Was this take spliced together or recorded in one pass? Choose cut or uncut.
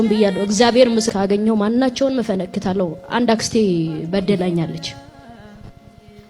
cut